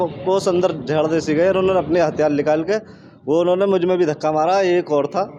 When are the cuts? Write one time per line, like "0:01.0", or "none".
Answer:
none